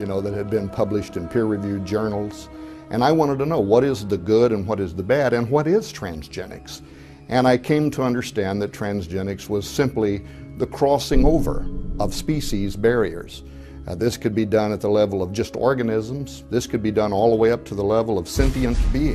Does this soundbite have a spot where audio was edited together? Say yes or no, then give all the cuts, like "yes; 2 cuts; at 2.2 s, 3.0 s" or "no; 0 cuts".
yes; 1 cut; at 11.8 s